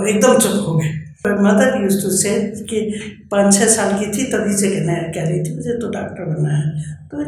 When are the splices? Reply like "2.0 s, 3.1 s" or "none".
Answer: 1.2 s

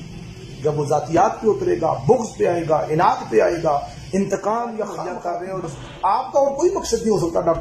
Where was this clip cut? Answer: 5.0 s

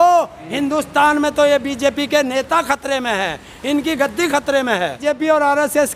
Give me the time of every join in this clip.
5.0 s

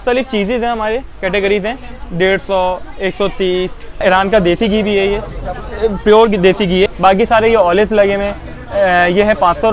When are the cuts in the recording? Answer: 4.0 s, 6.9 s

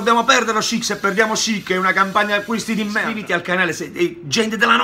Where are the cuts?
3.1 s

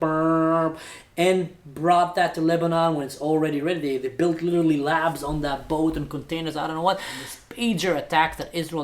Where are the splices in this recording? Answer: 7.4 s

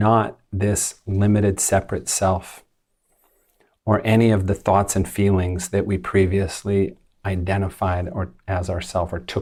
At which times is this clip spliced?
none

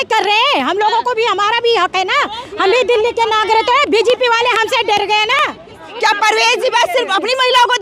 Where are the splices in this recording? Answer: 5.8 s

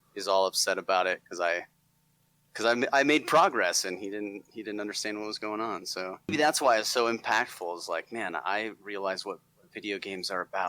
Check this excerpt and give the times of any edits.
6.3 s

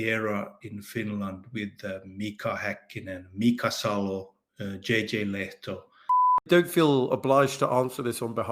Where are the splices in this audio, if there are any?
6.4 s

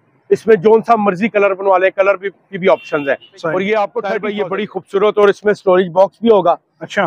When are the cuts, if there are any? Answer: 4.3 s

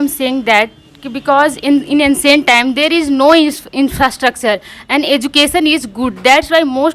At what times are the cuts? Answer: none

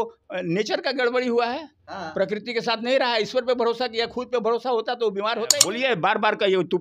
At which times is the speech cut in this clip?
5.6 s

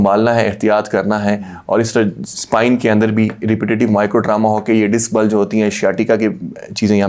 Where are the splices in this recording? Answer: none

